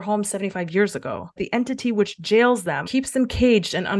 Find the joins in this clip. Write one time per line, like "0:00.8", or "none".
0:01.3
0:02.8